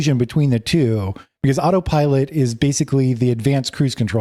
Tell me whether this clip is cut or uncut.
uncut